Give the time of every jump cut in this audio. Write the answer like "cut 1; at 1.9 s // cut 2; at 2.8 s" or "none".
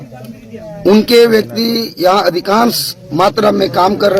none